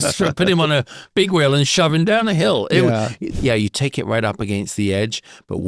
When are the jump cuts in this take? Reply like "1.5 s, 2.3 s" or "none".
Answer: 3.2 s